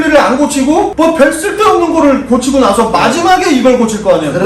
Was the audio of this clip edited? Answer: no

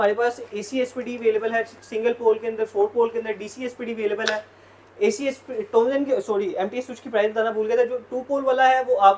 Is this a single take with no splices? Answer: yes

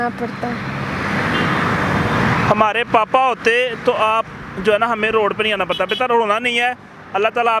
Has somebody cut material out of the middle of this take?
no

